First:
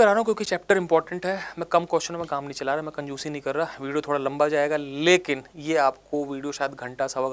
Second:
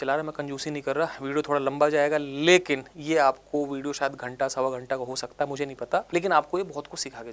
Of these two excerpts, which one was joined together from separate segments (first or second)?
second